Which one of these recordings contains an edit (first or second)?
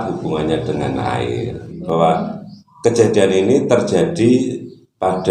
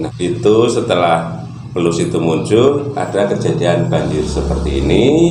first